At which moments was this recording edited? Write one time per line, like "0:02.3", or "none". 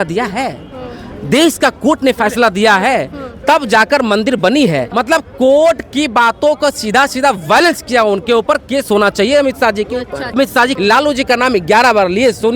0:04.9
0:10.6